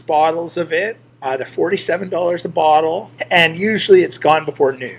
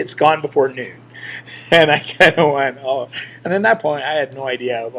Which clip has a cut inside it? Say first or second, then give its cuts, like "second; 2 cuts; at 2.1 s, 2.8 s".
first; 2 cuts; at 1.1 s, 3.1 s